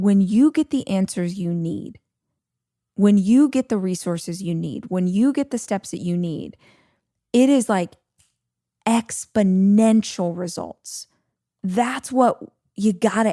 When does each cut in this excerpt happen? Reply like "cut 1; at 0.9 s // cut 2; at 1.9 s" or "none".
none